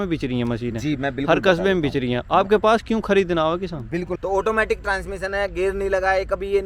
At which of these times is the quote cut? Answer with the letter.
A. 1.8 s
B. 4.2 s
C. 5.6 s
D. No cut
B